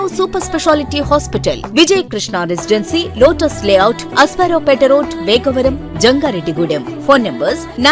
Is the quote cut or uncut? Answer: uncut